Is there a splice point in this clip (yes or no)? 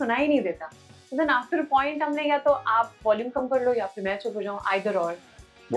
no